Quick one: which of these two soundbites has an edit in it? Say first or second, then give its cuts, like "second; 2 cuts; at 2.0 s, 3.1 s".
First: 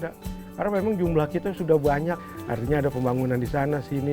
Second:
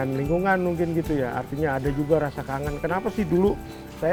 first; 1 cut; at 2.3 s